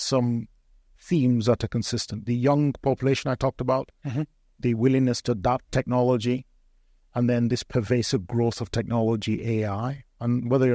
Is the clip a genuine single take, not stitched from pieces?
yes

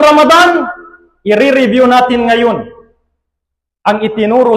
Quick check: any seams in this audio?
no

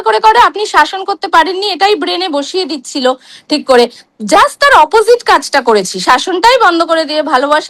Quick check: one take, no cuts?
yes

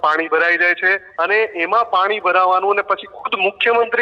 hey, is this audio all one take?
no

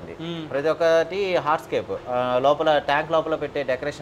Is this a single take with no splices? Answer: yes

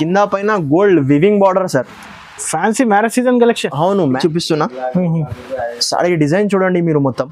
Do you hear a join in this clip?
yes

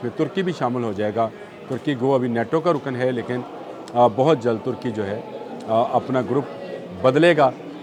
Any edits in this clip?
no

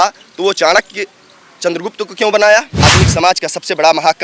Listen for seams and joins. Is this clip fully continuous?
no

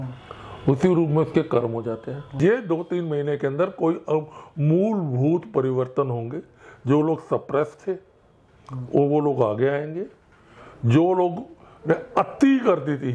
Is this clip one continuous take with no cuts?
no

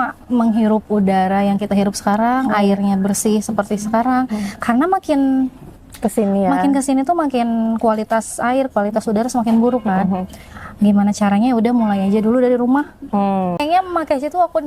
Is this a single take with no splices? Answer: no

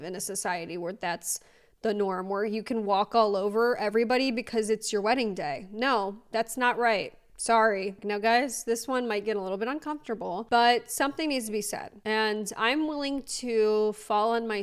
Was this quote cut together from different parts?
yes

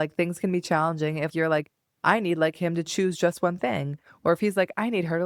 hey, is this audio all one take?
no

